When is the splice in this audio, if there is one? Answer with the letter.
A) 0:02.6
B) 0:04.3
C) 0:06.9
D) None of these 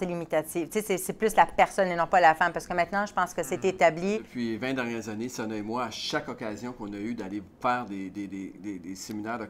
B